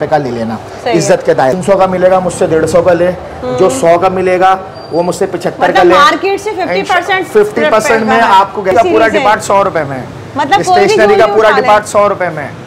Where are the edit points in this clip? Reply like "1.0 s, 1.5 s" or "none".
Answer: 1.5 s, 8.7 s